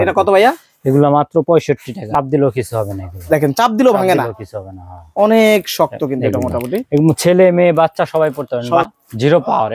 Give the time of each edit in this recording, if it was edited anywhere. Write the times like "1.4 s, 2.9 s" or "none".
2.1 s, 8.9 s